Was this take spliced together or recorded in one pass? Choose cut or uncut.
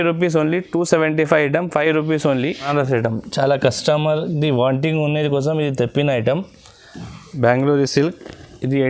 cut